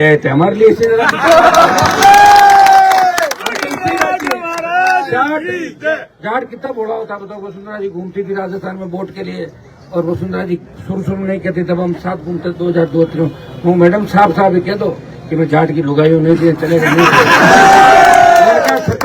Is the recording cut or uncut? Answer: uncut